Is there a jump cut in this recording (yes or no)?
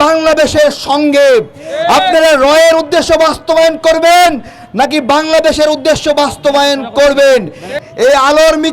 yes